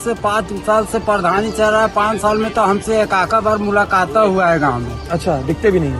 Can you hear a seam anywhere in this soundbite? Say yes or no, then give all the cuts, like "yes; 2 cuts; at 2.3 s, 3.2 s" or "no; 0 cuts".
no; 0 cuts